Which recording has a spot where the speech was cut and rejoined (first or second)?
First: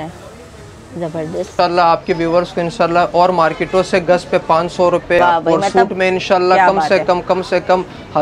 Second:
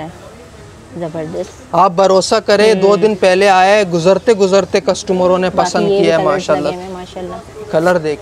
first